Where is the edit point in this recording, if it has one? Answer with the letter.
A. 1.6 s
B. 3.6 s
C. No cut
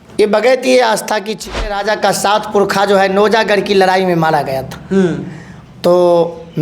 A